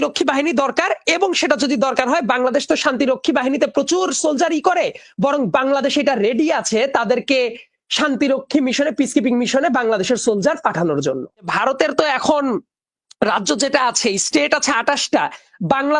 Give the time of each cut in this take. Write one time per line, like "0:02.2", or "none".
0:11.5